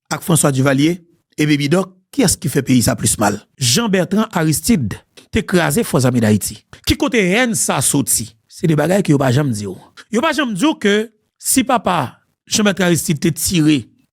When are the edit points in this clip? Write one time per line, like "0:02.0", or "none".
0:03.5